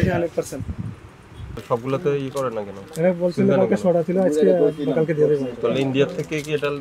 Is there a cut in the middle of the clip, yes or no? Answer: yes